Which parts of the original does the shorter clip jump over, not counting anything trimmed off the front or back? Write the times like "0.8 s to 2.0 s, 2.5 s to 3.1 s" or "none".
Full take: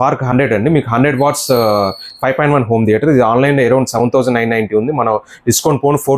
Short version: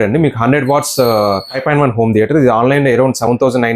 2.0 s to 2.2 s